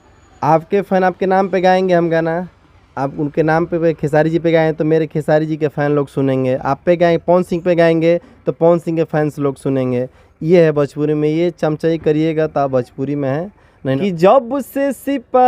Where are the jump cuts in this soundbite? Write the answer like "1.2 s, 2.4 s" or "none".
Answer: 14.0 s